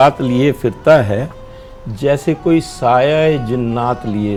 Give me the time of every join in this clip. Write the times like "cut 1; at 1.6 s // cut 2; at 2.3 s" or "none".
none